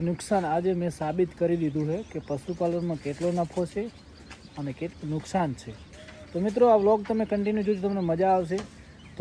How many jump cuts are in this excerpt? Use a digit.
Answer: 0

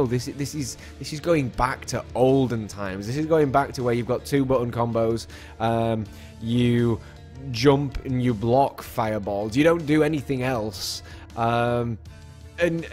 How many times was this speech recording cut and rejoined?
0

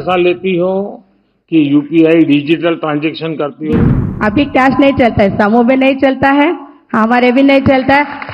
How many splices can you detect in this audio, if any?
1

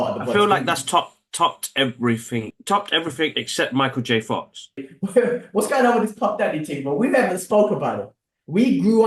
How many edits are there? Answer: 2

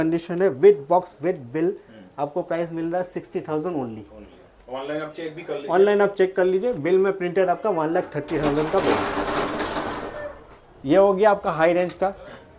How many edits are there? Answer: 0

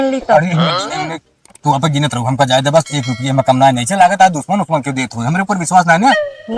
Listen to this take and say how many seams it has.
0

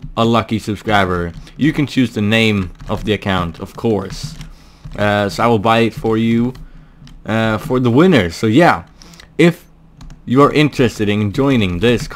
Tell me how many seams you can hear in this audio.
1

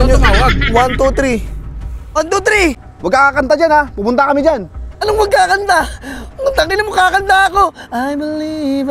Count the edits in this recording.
2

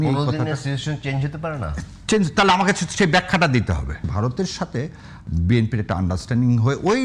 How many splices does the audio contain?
1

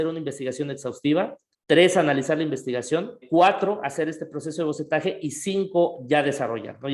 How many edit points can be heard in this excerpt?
2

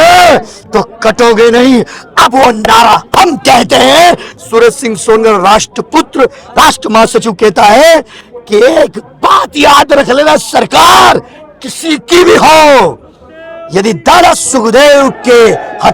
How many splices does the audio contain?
0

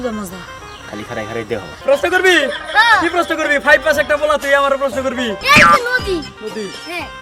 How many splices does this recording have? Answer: 2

